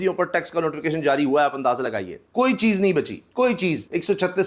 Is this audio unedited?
yes; 0 cuts

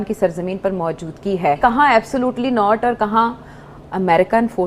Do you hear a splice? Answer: yes; 1 cut; at 1.6 s

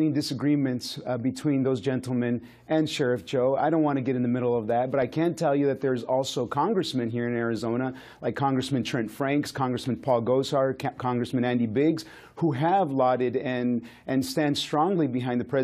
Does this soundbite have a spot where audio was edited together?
yes; 1 cut; at 11.9 s

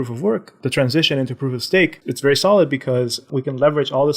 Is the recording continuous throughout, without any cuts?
no; 1 cut; at 2.0 s

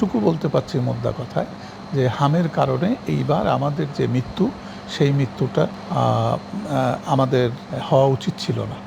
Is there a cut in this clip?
no; 0 cuts

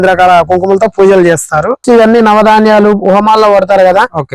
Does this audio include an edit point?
yes; 1 cut; at 1.8 s

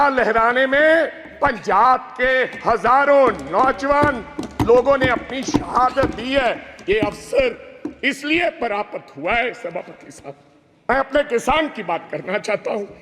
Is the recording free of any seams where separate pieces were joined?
no; 1 cut; at 10.9 s

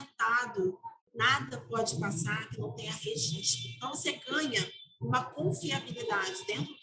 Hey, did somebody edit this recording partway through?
yes; 1 cut; at 0.9 s

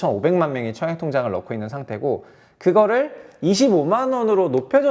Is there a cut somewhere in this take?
no; 0 cuts

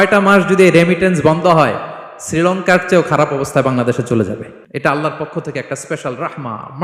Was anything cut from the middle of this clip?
yes; 1 cut; at 4.6 s

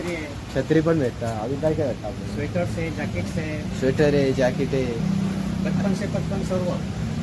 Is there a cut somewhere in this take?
no; 0 cuts

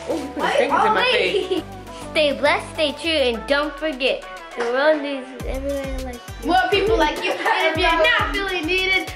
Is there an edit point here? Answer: yes; 1 cut; at 1.6 s

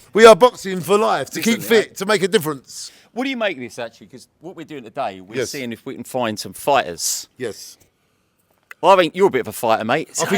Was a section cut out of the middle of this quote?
no; 0 cuts

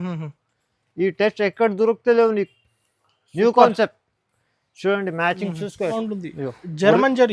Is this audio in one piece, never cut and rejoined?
no; 1 cut; at 5.9 s

